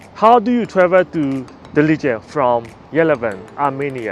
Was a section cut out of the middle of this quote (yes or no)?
no